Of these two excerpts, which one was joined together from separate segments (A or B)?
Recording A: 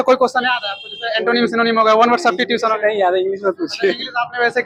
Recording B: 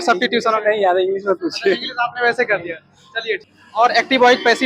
B